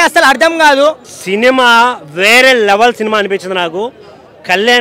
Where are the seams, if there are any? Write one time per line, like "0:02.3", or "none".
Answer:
0:01.1